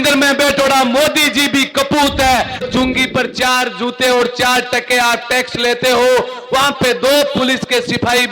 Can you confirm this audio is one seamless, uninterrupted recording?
no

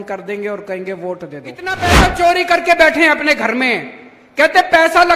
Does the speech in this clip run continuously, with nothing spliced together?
no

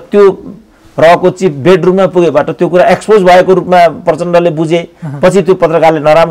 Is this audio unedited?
yes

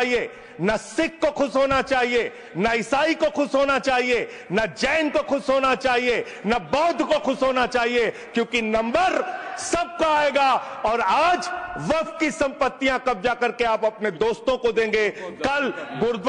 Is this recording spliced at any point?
no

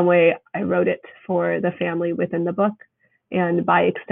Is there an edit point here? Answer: no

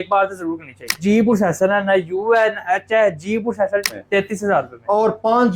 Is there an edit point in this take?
yes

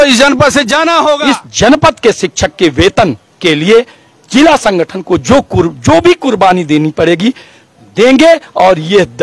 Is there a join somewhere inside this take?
yes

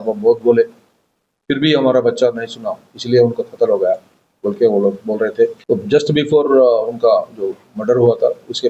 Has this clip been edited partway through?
yes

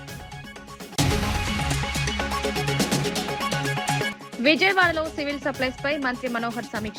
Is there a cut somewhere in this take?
yes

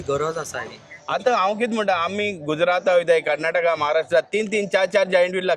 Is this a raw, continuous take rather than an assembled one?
no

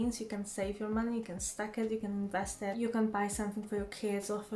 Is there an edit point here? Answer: yes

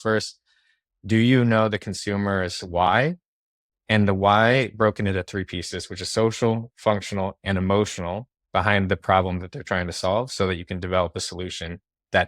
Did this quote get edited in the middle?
no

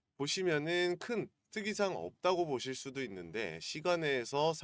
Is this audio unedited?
yes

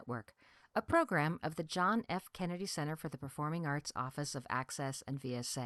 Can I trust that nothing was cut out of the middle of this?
yes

